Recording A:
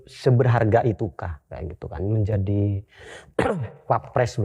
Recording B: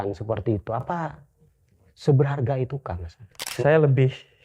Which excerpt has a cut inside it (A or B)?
B